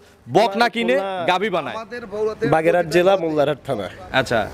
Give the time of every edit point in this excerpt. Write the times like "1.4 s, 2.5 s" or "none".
2.4 s